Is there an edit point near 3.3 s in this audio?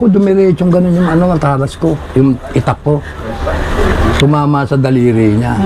no; 0 cuts

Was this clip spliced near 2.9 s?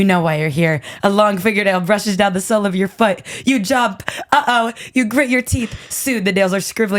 no; 0 cuts

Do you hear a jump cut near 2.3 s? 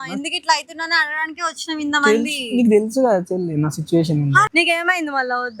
no; 1 cut; at 4.5 s

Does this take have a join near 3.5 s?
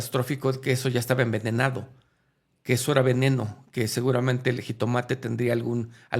no; 0 cuts

